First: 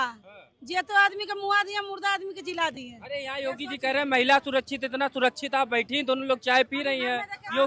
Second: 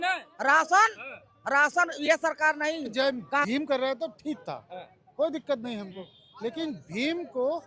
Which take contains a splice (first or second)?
second